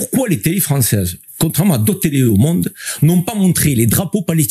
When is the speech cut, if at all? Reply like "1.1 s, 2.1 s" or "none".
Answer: 1.2 s